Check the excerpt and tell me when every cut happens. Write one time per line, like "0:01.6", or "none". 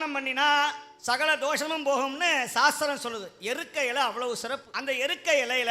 0:00.9
0:04.7